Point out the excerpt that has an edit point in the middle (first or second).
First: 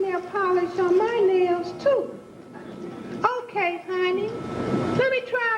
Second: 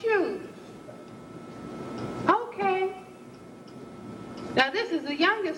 first